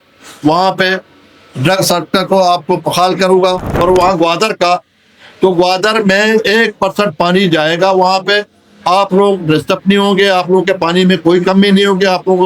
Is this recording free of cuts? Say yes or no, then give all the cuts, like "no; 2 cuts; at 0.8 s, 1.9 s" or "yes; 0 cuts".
no; 1 cut; at 3.7 s